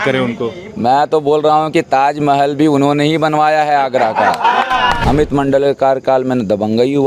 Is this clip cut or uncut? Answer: cut